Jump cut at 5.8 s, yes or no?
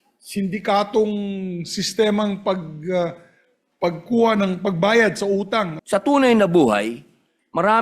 yes